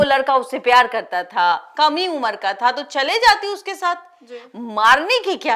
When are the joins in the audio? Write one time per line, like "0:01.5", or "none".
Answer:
none